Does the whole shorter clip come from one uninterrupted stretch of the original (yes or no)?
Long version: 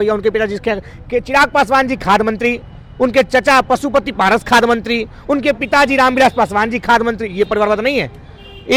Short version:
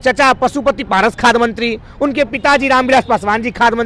yes